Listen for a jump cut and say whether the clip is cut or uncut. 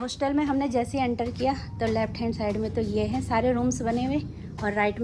uncut